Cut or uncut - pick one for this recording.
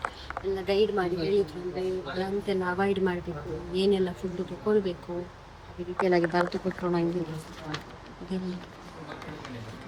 uncut